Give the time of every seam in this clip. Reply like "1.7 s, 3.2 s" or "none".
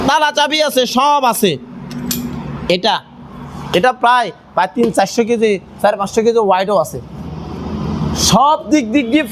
none